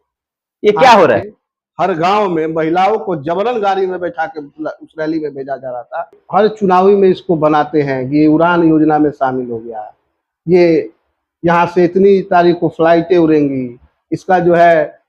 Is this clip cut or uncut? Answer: cut